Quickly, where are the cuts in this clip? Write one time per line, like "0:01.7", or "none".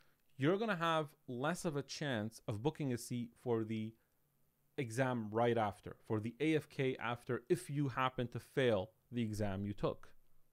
none